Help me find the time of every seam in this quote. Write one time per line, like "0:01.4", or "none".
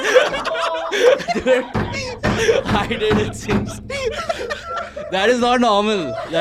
none